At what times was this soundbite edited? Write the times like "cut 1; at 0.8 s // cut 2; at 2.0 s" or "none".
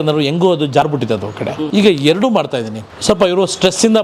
cut 1; at 1.6 s // cut 2; at 2.8 s